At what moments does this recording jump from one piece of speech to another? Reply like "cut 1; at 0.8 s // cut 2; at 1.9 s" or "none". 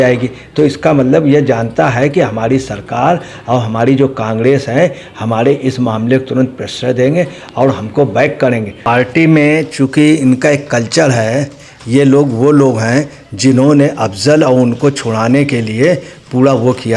cut 1; at 8.7 s